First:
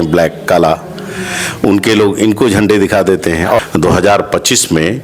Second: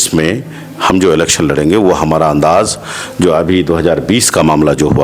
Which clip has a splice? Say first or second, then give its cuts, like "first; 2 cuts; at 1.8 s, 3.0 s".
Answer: first; 1 cut; at 3.6 s